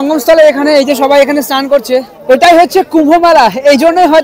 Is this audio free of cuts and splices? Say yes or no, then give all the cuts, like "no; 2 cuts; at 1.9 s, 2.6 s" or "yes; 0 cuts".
no; 1 cut; at 2.1 s